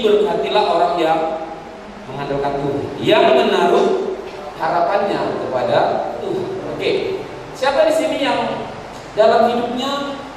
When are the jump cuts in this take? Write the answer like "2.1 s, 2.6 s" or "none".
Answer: none